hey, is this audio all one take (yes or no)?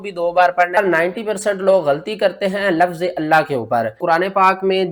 no